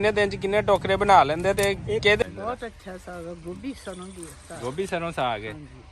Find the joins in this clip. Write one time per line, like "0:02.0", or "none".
0:02.2